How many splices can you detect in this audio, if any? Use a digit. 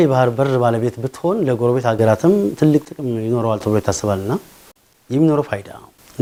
0